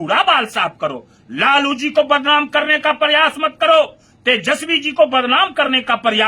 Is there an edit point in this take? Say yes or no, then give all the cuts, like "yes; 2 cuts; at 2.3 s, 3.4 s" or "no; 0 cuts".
no; 0 cuts